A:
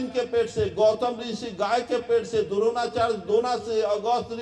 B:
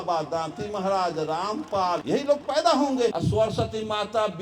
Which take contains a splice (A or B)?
B